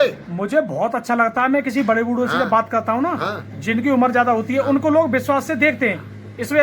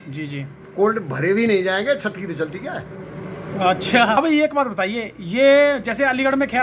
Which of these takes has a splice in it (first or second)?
second